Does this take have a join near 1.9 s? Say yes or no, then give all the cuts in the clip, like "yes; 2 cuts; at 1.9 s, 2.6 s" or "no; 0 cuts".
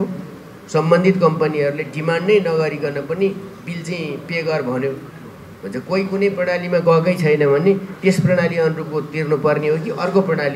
no; 0 cuts